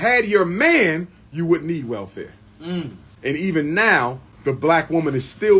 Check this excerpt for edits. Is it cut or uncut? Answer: cut